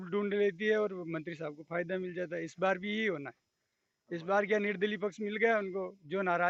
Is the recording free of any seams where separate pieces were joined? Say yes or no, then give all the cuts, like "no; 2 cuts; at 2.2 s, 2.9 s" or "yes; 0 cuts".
yes; 0 cuts